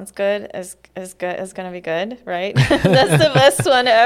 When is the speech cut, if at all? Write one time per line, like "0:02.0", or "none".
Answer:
none